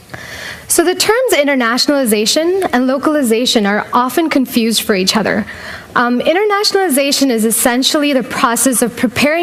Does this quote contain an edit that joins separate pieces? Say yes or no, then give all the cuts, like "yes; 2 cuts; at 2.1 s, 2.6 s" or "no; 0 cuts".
no; 0 cuts